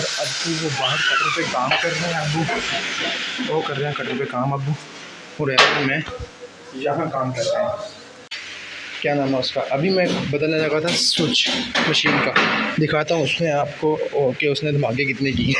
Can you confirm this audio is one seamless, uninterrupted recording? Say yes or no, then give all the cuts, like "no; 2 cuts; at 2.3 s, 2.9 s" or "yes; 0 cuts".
no; 1 cut; at 8.3 s